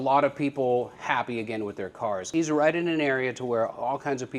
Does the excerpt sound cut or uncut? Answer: cut